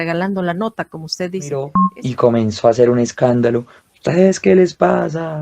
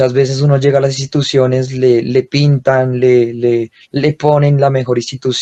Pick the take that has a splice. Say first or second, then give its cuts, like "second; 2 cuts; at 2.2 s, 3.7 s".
first; 1 cut; at 1.8 s